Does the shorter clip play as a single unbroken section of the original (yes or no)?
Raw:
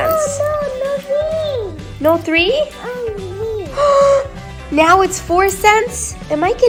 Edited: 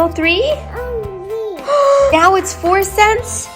no